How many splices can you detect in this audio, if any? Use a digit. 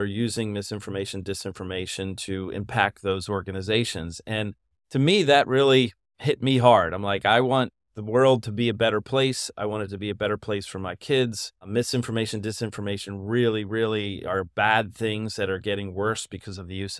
0